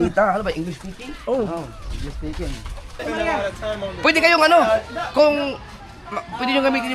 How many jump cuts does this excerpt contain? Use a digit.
1